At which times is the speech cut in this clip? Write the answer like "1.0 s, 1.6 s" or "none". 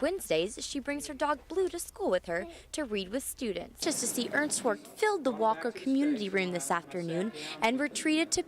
3.8 s